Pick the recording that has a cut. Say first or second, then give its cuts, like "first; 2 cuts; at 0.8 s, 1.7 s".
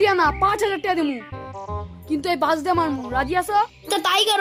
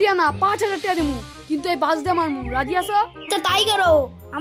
second; 1 cut; at 1.3 s